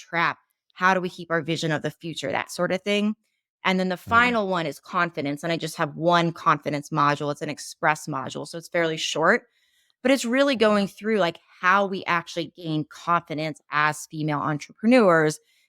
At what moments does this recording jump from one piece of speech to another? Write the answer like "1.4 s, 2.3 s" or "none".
2.0 s